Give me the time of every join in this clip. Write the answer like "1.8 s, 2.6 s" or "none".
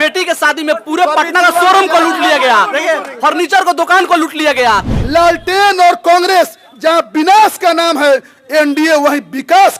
4.9 s